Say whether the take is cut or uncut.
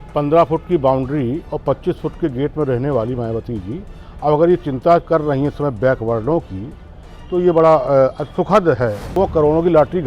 cut